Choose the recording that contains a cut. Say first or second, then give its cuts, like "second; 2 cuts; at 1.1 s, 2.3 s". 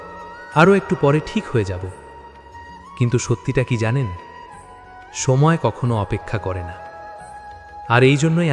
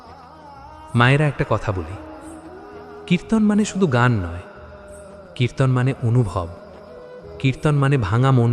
second; 1 cut; at 0.9 s